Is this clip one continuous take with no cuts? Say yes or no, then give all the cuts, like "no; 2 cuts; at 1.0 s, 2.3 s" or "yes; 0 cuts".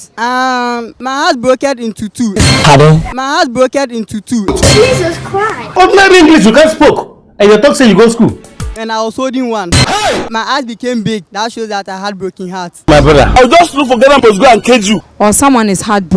yes; 0 cuts